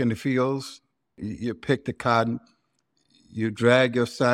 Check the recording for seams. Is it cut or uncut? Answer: cut